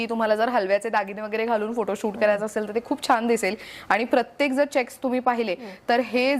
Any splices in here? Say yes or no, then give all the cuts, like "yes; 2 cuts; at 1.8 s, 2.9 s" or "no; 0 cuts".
no; 0 cuts